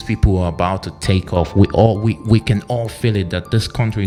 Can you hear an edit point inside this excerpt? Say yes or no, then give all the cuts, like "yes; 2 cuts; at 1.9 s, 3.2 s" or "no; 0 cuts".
no; 0 cuts